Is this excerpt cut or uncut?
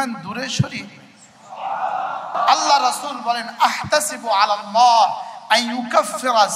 cut